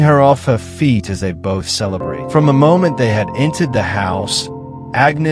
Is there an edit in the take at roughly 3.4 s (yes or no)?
no